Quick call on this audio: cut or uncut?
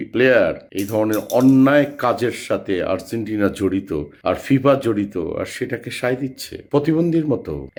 uncut